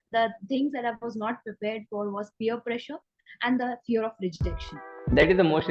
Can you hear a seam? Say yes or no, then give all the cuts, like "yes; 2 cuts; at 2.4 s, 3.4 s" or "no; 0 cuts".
no; 0 cuts